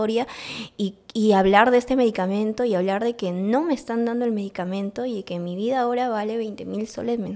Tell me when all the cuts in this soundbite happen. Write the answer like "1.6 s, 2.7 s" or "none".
none